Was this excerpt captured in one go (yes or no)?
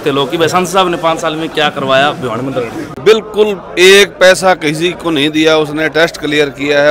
no